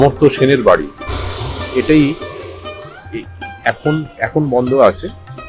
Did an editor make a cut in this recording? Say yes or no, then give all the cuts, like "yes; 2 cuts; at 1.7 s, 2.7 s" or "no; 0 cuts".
no; 0 cuts